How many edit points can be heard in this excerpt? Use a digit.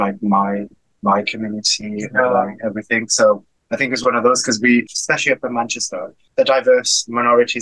1